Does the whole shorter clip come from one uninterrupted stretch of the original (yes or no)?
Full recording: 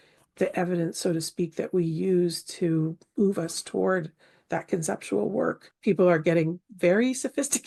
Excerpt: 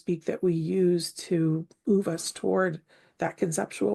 yes